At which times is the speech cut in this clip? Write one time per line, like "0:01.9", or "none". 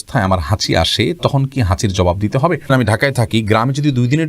0:02.7

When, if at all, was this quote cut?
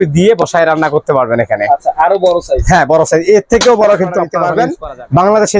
0:04.4

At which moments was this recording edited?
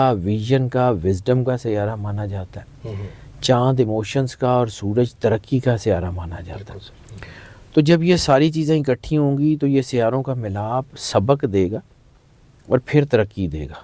none

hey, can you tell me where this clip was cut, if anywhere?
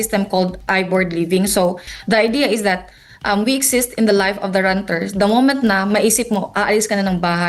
0:01.9

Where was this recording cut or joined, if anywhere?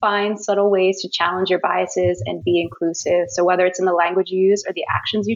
none

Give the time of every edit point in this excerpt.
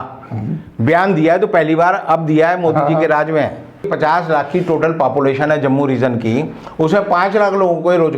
0:03.9

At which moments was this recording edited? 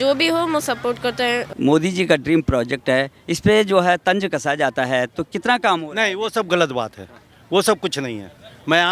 0:01.5

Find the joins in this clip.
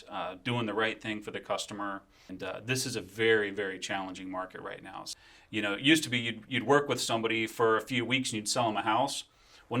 0:02.3
0:05.1

